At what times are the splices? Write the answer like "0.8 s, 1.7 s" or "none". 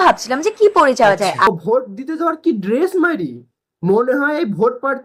1.5 s